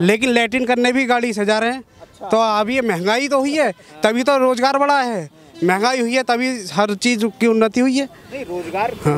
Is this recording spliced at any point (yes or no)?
no